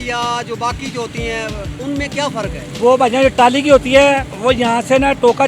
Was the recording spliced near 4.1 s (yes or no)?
no